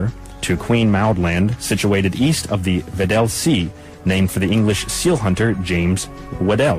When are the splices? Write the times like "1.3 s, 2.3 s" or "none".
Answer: 5.6 s

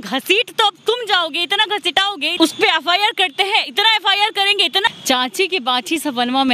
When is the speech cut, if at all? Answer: 2.2 s, 4.9 s

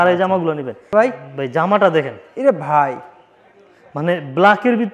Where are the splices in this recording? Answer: 0.9 s

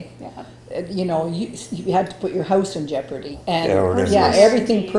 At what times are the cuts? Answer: 3.3 s

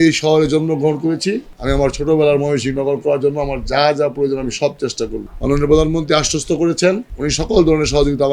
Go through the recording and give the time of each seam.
1.5 s, 7.1 s

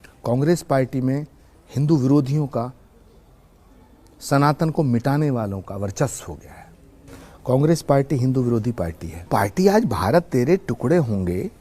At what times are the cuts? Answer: 9.3 s

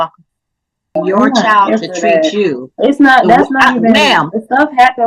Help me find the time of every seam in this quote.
0.9 s

